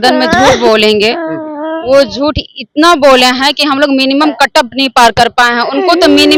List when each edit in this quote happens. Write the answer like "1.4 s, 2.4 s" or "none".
none